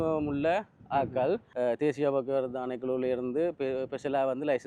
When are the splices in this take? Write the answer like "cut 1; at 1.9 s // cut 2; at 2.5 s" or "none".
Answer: cut 1; at 1.5 s